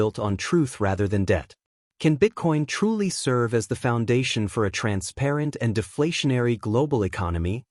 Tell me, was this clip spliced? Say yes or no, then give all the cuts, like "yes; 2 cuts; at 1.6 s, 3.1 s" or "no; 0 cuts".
no; 0 cuts